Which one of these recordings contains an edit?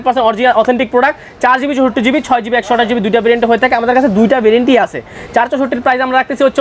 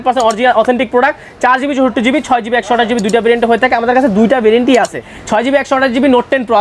second; 1 cut; at 5.1 s

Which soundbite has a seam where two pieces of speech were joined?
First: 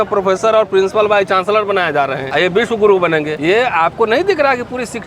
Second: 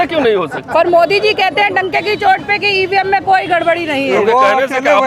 first; 2 cuts; at 2.2 s, 3.3 s

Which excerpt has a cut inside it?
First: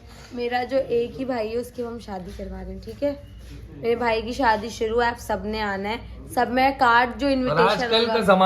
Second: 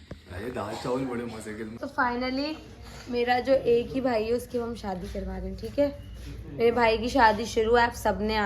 second; 1 cut; at 1.8 s

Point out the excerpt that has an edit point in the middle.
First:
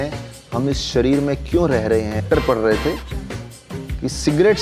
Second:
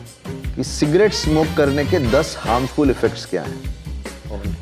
first; 1 cut; at 2.2 s

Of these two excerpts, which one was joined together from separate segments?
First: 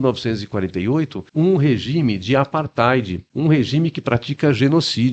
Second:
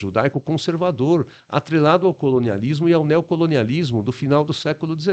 first; 2 cuts; at 1.2 s, 3.2 s

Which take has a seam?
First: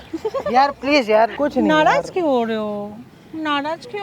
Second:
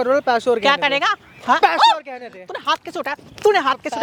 first; 1 cut; at 1.3 s

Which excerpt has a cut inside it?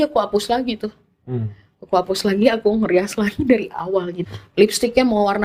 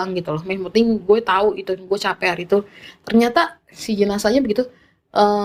first; 1 cut; at 4.2 s

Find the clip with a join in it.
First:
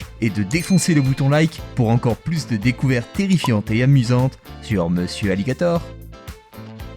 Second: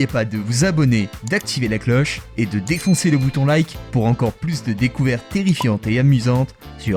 first; 1 cut; at 5.8 s

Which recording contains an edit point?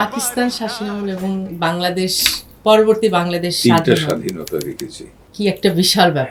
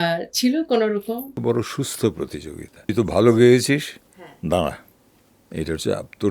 second; 1 cut; at 1.4 s

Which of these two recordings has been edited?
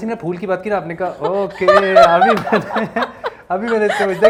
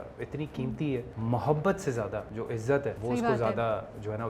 second; 2 cuts; at 1.1 s, 2.8 s

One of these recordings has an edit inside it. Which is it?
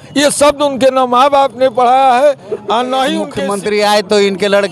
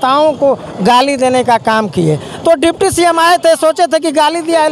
first; 1 cut; at 3.3 s

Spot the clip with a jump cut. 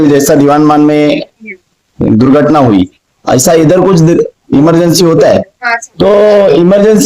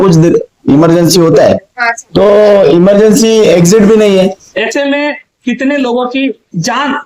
second; 1 cut; at 4.5 s

